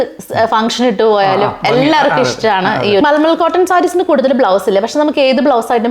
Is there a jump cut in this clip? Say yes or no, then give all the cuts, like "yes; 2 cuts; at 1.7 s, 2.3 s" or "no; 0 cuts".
yes; 1 cut; at 3.0 s